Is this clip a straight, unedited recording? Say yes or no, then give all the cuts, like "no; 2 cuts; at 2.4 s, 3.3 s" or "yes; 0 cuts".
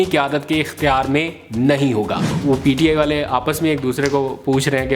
no; 1 cut; at 2.3 s